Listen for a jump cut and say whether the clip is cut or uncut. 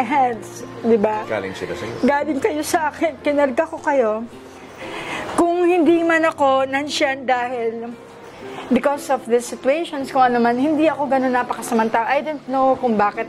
uncut